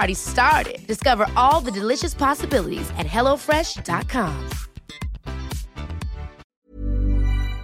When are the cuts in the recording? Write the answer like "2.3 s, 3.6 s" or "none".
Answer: 6.4 s